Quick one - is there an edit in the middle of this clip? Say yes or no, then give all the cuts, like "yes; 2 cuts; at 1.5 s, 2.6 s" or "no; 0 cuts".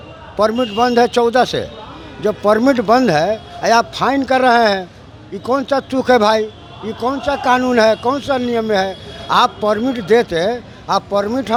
no; 0 cuts